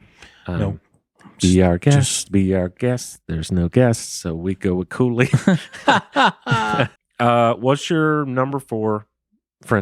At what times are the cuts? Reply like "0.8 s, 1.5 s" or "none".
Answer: 7.0 s